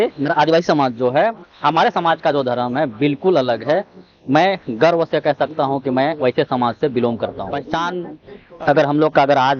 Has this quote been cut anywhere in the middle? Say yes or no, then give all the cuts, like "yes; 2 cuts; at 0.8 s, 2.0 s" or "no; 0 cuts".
yes; 1 cut; at 7.6 s